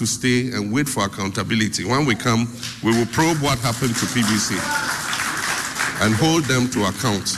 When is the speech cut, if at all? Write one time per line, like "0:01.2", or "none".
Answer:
none